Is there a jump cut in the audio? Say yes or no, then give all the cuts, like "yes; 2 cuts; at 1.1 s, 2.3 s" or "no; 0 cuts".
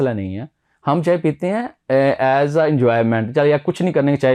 no; 0 cuts